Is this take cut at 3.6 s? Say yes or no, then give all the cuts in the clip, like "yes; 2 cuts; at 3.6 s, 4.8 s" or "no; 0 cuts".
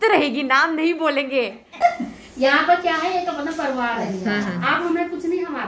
no; 1 cut; at 1.8 s